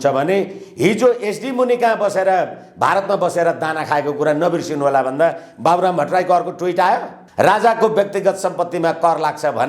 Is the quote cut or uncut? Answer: cut